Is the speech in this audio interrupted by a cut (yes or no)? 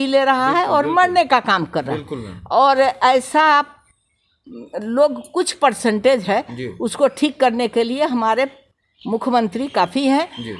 no